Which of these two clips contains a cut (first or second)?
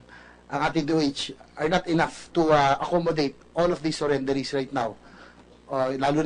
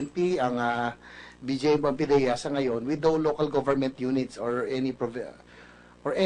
first